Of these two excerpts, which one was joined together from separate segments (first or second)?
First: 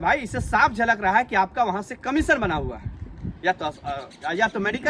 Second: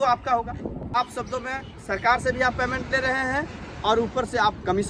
second